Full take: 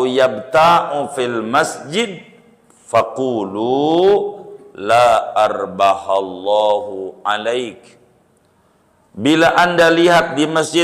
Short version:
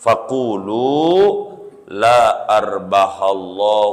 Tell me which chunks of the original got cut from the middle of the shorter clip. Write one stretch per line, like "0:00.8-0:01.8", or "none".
none